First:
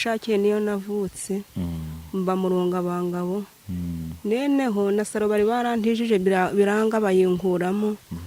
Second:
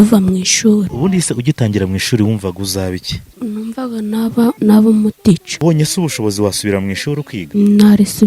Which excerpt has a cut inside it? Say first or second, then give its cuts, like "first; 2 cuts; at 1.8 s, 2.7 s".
second; 5 cuts; at 0.9 s, 3.3 s, 4.6 s, 5.5 s, 7.4 s